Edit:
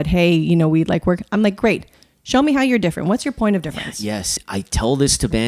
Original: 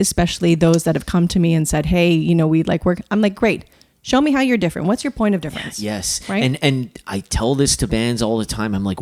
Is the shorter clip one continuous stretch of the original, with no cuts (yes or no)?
no